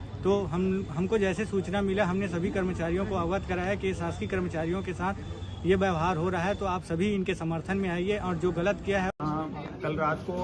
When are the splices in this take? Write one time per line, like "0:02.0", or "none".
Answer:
0:09.1